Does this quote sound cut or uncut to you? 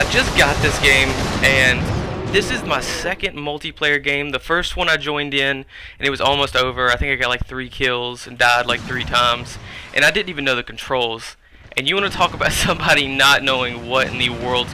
cut